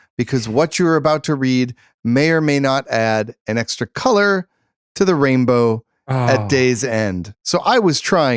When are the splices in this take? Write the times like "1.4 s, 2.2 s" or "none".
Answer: none